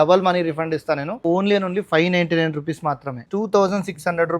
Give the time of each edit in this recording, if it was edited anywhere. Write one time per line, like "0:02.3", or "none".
0:01.2
0:03.2